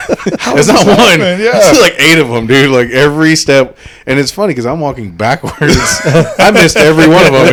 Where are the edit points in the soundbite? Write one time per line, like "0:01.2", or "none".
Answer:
none